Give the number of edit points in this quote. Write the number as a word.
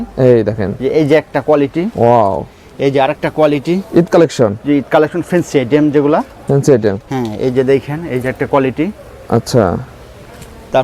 zero